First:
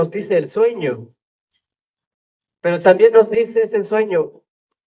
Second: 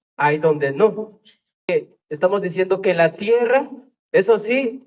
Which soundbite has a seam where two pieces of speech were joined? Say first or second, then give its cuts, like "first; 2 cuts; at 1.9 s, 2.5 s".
second; 1 cut; at 1.7 s